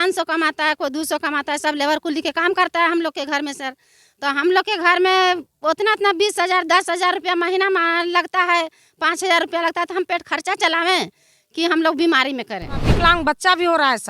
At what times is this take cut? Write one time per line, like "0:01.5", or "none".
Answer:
0:12.9